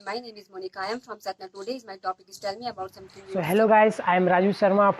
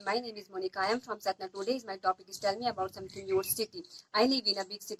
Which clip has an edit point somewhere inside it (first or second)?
first